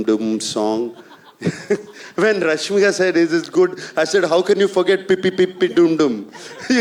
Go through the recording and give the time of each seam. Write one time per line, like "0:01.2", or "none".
none